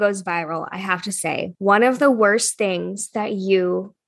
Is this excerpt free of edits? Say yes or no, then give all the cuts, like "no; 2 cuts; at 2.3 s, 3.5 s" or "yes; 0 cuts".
no; 1 cut; at 1.5 s